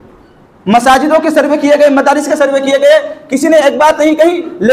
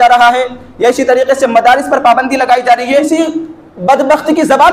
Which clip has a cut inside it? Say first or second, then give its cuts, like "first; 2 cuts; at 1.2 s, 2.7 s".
second; 1 cut; at 3.1 s